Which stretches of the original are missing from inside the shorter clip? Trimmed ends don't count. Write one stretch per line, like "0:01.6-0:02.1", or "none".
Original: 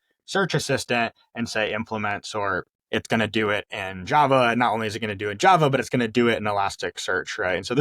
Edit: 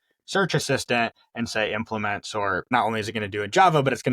0:02.7-0:04.6